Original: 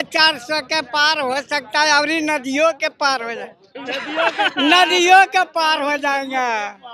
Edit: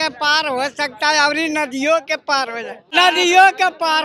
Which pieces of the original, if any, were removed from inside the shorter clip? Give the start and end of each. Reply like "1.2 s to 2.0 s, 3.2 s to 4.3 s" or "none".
3.7 s to 4.7 s